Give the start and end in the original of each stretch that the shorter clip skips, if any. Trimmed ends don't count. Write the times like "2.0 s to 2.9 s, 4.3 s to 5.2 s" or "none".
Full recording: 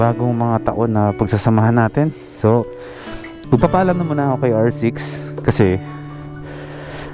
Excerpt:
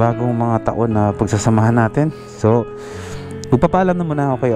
none